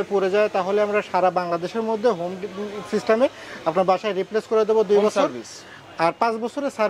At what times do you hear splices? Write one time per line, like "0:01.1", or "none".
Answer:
none